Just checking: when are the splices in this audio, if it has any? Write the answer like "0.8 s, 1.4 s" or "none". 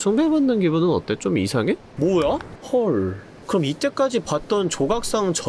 2.5 s